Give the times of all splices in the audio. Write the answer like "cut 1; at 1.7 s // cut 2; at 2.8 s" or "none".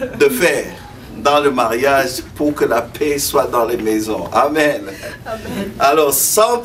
none